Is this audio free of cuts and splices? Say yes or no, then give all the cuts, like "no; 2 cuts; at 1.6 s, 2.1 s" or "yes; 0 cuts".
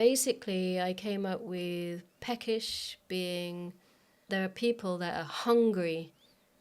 no; 1 cut; at 4.2 s